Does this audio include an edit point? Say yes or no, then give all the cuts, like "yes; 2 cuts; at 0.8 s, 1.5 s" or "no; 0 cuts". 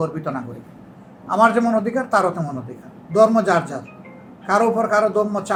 no; 0 cuts